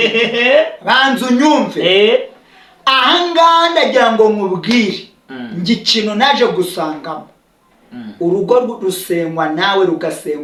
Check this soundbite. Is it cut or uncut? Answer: uncut